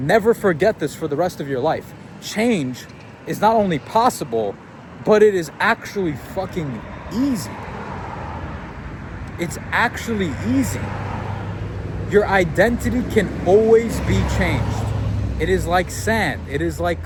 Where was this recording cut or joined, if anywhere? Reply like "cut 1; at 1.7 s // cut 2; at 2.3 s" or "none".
none